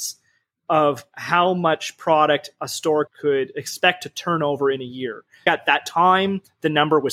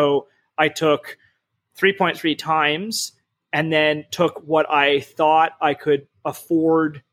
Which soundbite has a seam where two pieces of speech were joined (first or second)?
first